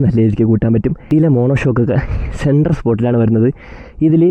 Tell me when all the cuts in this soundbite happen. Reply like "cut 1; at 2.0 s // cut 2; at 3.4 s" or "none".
cut 1; at 1.1 s

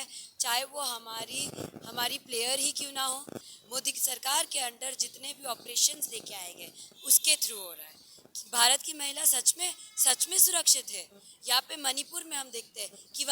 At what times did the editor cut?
cut 1; at 3.4 s

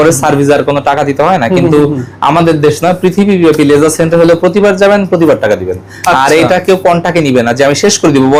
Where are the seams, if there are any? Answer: none

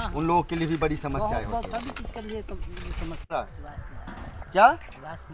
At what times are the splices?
cut 1; at 3.3 s

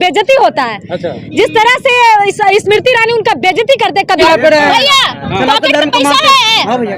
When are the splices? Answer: cut 1; at 4.2 s

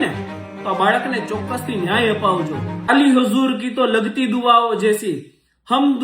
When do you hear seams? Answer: cut 1; at 2.9 s

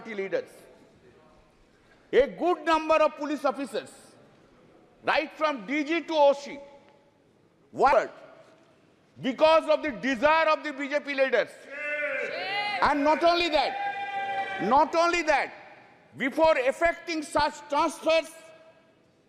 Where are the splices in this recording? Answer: cut 1; at 7.9 s

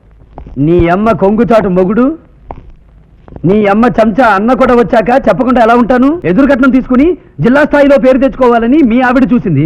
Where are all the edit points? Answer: cut 1; at 6.2 s

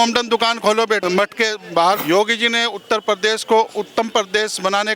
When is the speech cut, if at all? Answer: cut 1; at 1.0 s // cut 2; at 2.0 s

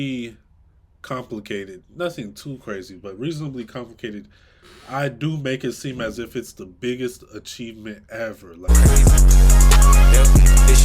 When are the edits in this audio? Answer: cut 1; at 8.6 s

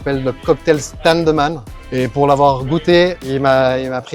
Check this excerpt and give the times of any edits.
cut 1; at 3.2 s

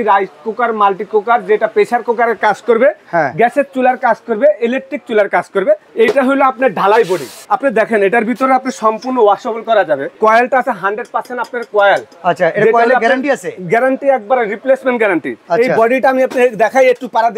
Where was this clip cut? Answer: cut 1; at 5.9 s // cut 2; at 7.4 s // cut 3; at 10.2 s // cut 4; at 15.4 s

